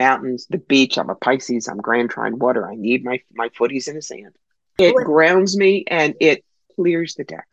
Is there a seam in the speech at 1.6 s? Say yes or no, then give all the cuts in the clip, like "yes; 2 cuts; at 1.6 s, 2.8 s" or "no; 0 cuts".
no; 2 cuts; at 4.8 s, 6.6 s